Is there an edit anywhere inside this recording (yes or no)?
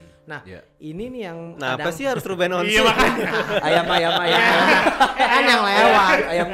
no